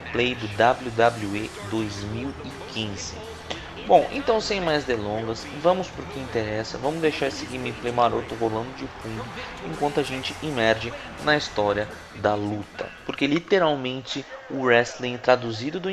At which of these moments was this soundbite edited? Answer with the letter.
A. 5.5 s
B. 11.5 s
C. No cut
B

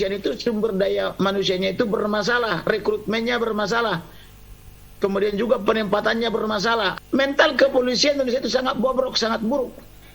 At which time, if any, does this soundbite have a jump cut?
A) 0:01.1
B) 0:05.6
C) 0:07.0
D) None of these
C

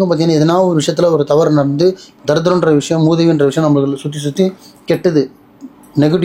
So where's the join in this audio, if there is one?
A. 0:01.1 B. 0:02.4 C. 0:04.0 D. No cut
D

